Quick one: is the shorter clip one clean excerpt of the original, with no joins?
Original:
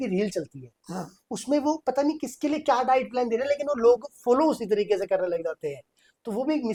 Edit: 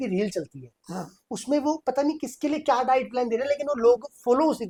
yes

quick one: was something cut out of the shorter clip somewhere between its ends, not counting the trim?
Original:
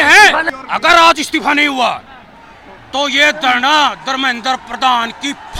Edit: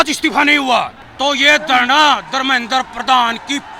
yes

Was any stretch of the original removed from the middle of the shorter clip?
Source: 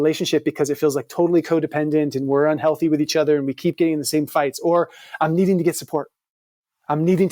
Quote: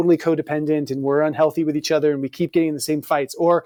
no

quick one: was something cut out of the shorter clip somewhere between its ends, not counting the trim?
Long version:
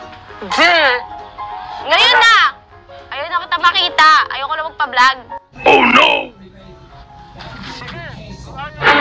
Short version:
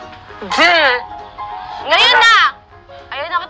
no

